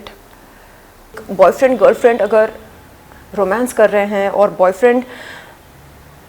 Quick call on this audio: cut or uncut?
cut